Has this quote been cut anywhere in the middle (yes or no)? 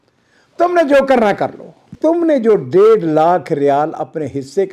yes